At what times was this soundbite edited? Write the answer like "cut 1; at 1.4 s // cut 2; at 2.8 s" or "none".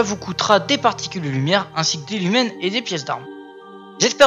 cut 1; at 2.2 s